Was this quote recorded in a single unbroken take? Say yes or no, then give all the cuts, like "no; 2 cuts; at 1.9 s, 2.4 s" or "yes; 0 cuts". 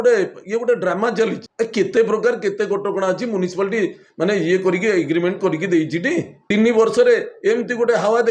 yes; 0 cuts